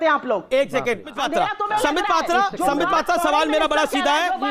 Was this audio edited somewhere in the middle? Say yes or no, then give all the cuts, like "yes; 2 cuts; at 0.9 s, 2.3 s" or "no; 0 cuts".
yes; 1 cut; at 1.1 s